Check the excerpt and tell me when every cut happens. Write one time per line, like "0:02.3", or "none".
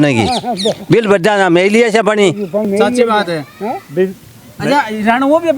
none